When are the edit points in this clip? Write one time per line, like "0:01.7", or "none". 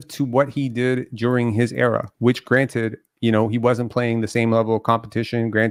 none